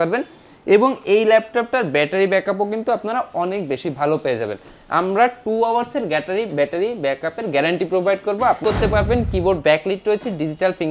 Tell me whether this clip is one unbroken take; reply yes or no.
no